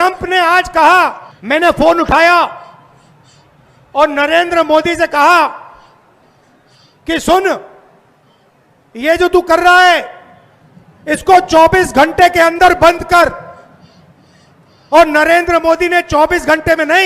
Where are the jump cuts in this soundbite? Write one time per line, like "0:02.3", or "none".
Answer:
0:01.4